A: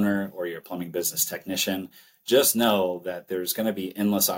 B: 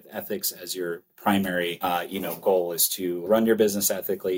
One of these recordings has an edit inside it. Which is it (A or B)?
B